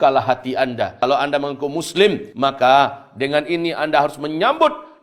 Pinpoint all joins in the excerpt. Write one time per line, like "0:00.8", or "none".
0:00.9
0:02.3